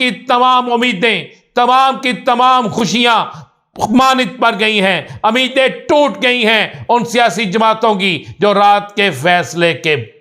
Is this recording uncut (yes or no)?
yes